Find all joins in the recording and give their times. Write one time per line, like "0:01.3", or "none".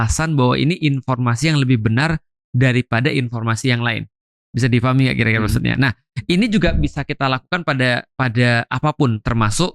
none